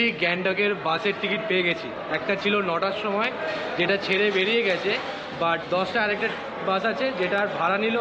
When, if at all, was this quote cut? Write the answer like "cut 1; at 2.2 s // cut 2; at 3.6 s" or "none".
none